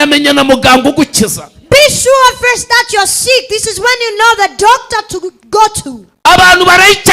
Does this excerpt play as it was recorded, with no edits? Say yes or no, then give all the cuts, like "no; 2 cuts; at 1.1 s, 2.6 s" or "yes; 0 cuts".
yes; 0 cuts